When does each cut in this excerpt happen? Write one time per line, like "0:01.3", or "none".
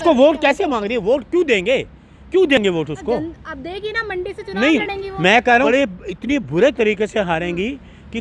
none